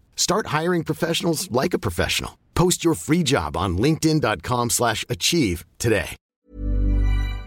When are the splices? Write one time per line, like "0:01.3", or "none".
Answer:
0:06.4